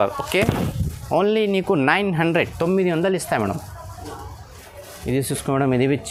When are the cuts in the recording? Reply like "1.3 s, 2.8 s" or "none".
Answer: none